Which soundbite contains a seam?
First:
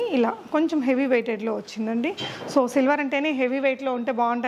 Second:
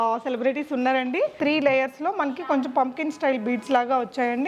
second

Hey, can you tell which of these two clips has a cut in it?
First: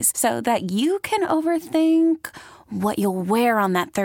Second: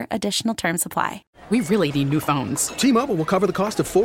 second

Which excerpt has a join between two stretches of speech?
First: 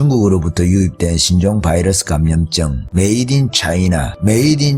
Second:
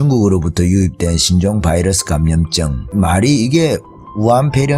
first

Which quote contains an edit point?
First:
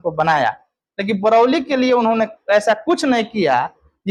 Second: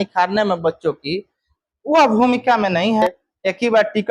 second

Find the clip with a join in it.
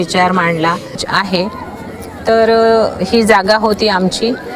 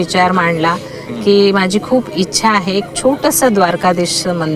first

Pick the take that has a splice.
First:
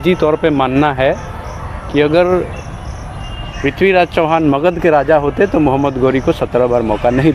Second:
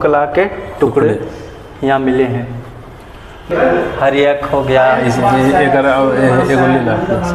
second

